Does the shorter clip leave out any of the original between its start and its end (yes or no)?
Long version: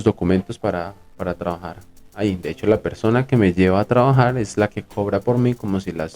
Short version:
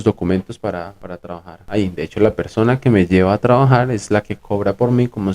yes